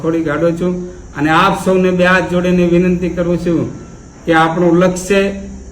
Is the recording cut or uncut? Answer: uncut